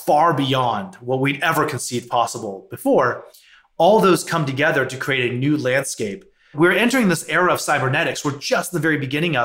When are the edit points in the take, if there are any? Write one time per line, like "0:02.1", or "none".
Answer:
0:06.5